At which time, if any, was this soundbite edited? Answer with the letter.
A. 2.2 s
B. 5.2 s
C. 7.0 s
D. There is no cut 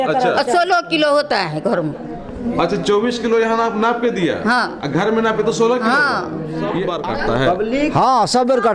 C